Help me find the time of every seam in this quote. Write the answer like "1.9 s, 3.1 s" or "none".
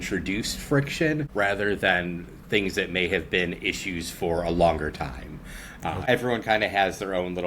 6.0 s